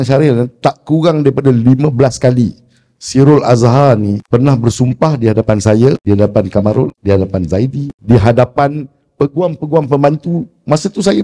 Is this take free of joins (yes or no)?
no